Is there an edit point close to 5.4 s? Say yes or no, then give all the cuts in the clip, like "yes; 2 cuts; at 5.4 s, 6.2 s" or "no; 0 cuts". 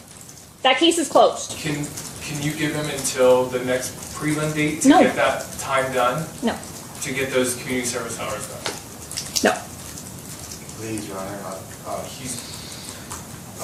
no; 0 cuts